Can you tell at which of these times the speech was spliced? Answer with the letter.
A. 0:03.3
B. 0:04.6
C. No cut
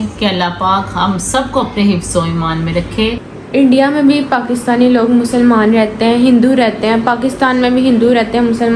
A